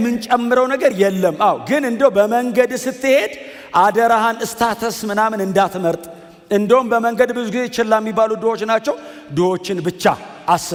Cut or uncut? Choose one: uncut